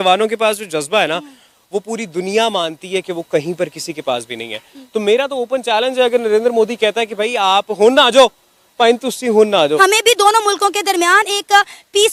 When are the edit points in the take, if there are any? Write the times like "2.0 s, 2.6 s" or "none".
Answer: none